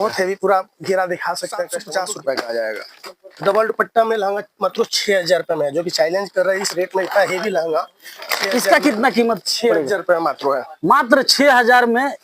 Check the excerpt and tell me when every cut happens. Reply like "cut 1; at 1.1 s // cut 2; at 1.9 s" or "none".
cut 1; at 1.8 s // cut 2; at 2.9 s